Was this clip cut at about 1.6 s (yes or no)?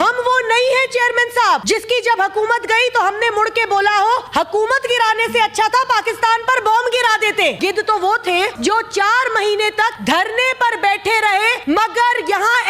yes